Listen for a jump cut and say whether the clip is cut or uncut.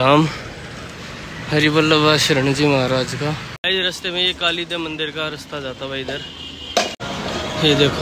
cut